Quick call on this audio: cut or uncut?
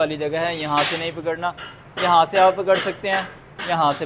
uncut